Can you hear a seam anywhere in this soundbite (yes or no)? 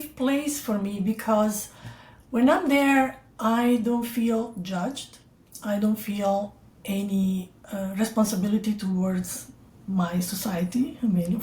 no